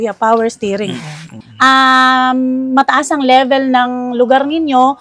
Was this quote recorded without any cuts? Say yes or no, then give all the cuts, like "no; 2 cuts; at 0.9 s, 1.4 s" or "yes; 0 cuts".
no; 1 cut; at 1.4 s